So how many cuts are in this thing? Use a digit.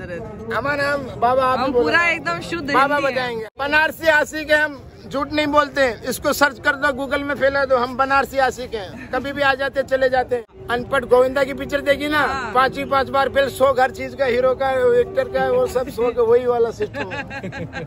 2